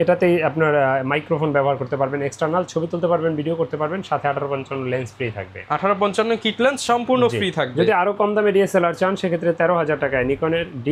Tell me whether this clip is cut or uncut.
uncut